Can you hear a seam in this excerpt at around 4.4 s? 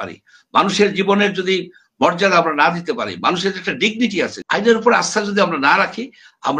yes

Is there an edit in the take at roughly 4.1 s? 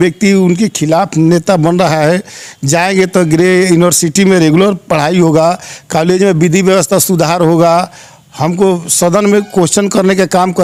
no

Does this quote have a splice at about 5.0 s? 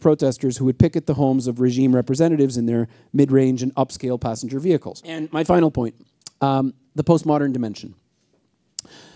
yes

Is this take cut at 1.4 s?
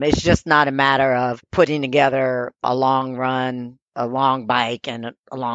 yes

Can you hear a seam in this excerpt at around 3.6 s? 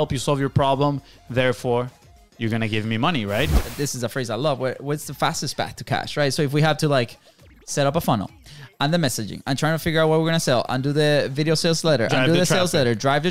yes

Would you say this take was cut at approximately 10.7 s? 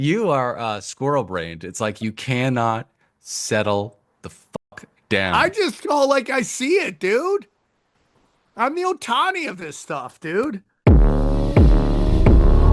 yes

